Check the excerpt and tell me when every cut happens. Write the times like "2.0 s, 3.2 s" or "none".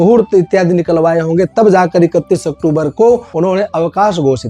3.3 s